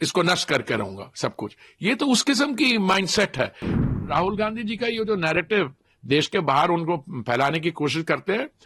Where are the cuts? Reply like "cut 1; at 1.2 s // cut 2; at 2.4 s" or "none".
cut 1; at 3.8 s